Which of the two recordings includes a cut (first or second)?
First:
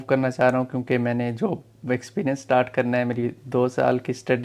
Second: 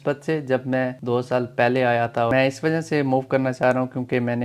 second